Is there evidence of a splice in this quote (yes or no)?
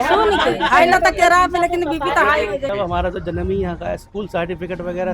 yes